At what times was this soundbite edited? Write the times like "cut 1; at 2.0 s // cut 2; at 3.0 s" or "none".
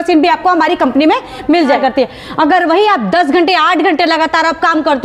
cut 1; at 1.8 s